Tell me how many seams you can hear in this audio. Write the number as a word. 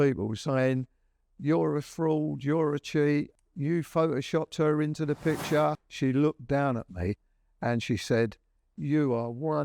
two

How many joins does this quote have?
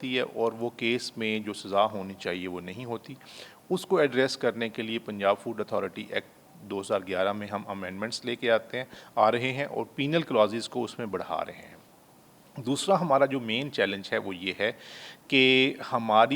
zero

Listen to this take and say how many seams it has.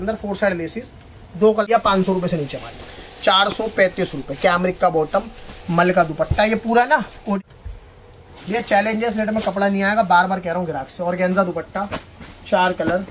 two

